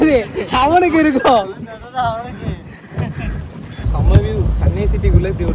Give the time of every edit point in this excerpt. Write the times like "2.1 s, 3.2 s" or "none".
3.8 s